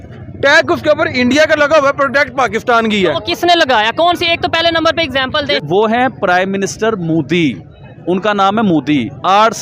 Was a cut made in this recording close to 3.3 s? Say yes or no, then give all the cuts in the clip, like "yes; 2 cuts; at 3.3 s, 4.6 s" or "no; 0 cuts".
no; 1 cut; at 5.6 s